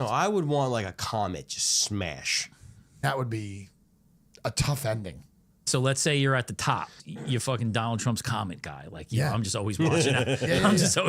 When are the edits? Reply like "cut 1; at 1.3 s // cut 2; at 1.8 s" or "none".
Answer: cut 1; at 3.0 s // cut 2; at 5.7 s // cut 3; at 7.0 s